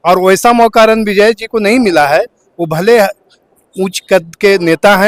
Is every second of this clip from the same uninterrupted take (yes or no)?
yes